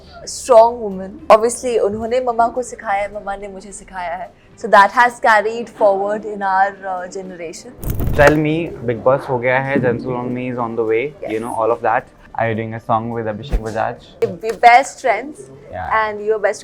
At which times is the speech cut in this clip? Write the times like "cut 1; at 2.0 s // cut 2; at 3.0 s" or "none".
cut 1; at 1.2 s // cut 2; at 8.0 s // cut 3; at 12.2 s // cut 4; at 14.0 s